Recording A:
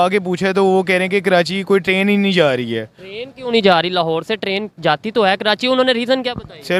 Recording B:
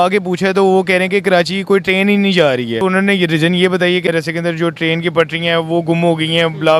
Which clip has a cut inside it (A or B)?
B